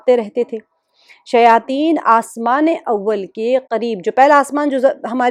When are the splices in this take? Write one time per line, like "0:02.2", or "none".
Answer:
none